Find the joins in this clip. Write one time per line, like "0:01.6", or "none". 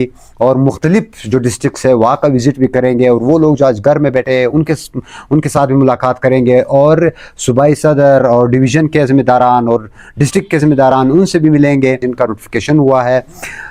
none